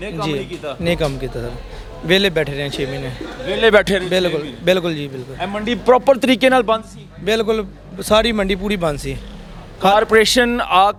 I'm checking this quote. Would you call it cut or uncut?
uncut